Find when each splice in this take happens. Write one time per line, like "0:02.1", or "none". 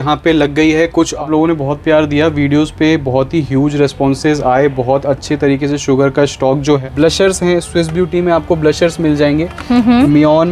0:01.2
0:06.8